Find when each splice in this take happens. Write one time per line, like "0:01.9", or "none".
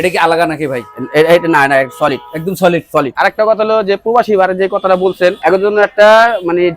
0:03.1
0:05.4